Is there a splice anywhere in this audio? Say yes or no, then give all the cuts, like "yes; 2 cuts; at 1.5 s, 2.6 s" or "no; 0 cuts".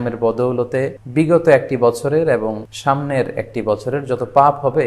yes; 2 cuts; at 1.0 s, 2.7 s